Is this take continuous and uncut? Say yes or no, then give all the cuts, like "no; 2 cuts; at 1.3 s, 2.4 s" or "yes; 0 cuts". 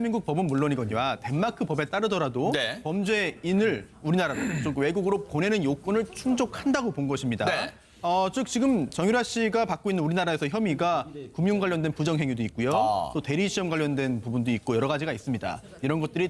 no; 1 cut; at 11.7 s